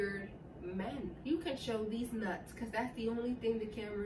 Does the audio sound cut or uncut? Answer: cut